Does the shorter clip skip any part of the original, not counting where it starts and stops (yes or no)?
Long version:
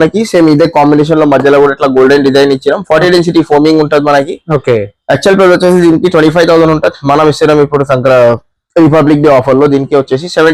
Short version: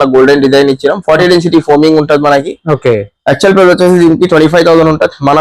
no